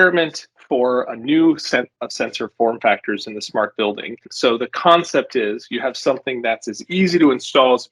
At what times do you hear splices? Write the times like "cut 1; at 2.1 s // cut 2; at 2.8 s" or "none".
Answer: cut 1; at 4.2 s